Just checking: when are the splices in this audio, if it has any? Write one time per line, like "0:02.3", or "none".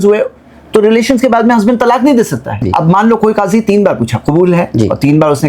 0:02.6